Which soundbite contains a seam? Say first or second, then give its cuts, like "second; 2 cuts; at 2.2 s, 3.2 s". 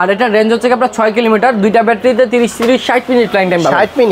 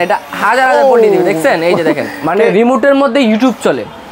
second; 1 cut; at 2.1 s